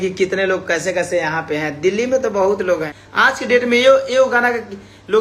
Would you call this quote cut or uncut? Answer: cut